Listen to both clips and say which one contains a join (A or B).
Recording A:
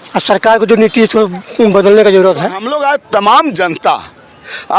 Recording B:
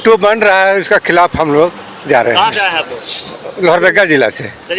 A